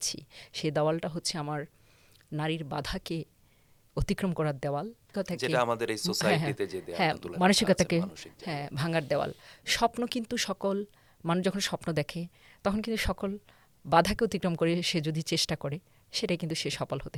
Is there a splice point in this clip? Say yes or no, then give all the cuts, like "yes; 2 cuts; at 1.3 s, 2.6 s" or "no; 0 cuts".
no; 0 cuts